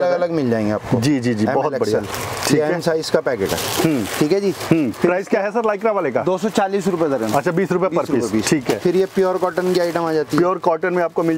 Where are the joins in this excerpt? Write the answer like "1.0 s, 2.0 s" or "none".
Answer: none